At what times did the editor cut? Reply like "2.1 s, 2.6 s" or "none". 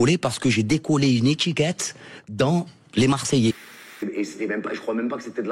3.8 s